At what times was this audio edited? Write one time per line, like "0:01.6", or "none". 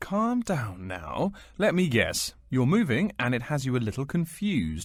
none